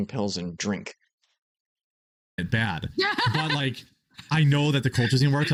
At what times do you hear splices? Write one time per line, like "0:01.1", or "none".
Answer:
none